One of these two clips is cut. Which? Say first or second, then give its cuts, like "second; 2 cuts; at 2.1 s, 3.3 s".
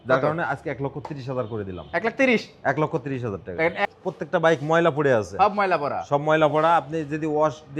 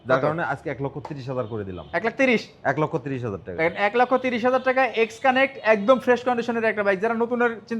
first; 1 cut; at 3.9 s